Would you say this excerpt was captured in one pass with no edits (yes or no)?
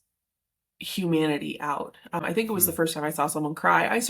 no